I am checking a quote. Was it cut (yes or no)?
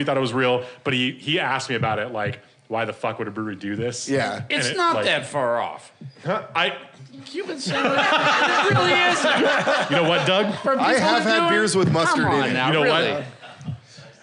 no